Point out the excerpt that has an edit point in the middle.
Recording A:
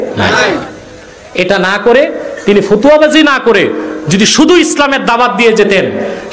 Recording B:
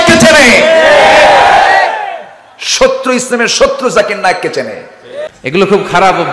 B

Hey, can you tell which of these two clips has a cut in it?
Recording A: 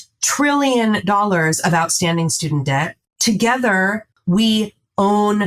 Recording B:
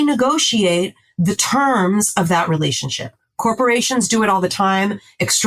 A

